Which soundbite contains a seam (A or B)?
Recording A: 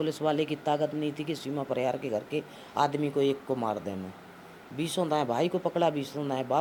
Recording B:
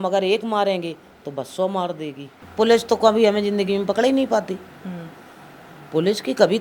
B